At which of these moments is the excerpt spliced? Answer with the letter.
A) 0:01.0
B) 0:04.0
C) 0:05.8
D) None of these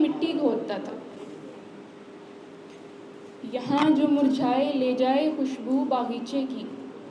D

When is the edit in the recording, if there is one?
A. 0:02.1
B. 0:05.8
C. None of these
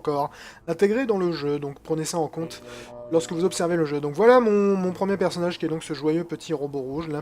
B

